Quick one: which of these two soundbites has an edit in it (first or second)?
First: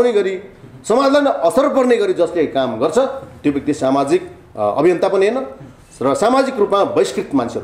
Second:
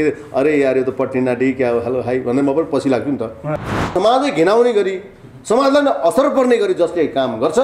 second